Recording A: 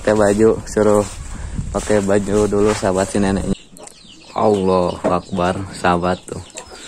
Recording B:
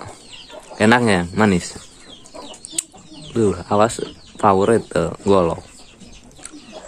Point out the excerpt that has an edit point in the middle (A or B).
A